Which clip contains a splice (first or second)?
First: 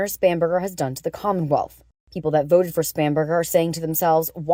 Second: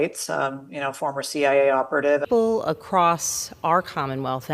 second